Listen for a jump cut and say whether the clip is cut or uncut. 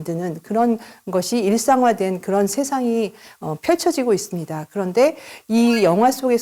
uncut